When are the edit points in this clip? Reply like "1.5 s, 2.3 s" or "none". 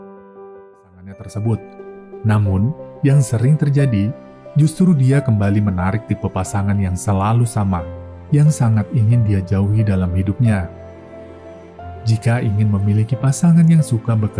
1.2 s